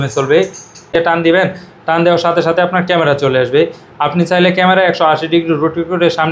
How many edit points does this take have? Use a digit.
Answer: 1